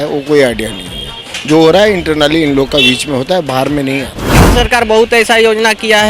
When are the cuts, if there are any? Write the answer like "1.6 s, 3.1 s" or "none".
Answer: 4.5 s